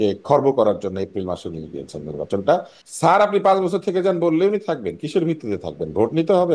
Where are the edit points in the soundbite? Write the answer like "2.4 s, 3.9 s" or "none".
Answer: 2.7 s